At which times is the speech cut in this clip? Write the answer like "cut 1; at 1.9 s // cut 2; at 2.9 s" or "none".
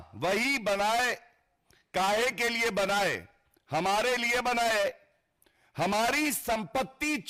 none